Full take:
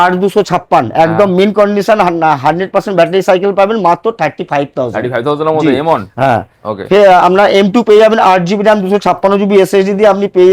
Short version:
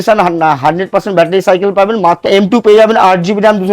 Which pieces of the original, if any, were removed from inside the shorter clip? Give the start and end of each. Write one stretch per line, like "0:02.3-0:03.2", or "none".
0:04.1-0:07.5